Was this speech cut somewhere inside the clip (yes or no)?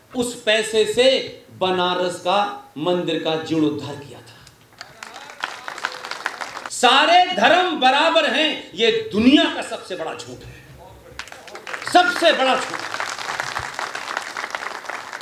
yes